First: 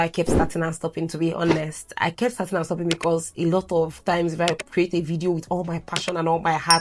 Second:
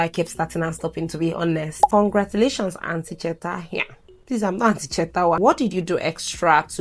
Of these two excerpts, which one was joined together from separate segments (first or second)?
second